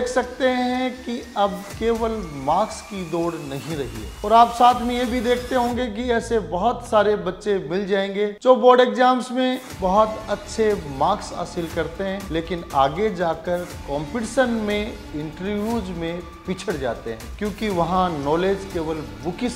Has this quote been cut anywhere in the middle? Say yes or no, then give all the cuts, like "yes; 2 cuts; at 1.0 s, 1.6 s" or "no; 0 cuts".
yes; 5 cuts; at 1.7 s, 4.0 s, 8.4 s, 12.2 s, 17.3 s